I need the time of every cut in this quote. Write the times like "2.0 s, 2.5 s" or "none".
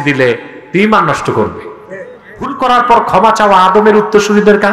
2.5 s